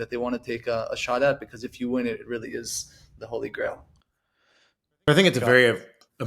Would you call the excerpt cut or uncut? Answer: uncut